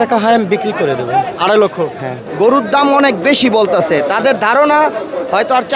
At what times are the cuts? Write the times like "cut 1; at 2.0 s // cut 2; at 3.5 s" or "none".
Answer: cut 1; at 2.2 s